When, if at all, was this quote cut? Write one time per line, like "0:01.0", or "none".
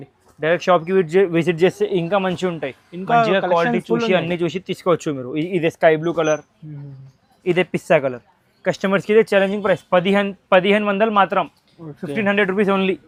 none